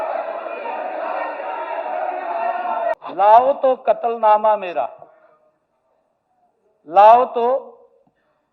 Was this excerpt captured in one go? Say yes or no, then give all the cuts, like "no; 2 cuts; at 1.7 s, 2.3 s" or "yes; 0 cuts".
no; 1 cut; at 2.9 s